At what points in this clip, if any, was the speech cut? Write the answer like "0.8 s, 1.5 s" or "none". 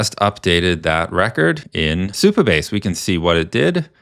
1.8 s